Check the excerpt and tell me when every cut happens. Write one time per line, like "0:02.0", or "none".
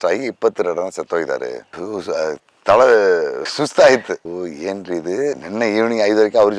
0:01.7